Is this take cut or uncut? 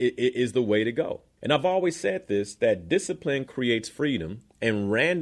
cut